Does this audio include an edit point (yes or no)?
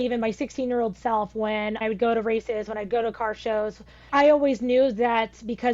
yes